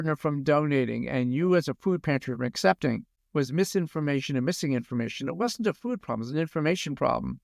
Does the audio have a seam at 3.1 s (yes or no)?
yes